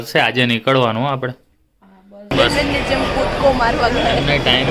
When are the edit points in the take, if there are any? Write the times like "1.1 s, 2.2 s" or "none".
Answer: 2.3 s